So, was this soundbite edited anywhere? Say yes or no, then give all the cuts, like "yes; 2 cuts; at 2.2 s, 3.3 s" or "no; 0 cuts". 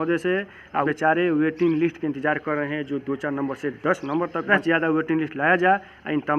yes; 2 cuts; at 0.8 s, 4.5 s